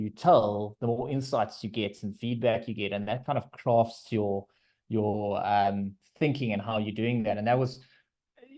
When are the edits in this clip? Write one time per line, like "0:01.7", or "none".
none